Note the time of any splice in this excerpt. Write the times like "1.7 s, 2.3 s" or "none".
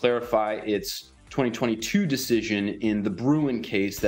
none